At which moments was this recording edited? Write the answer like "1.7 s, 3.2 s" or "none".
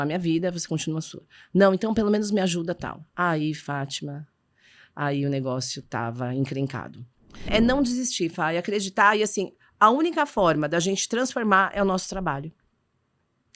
7.5 s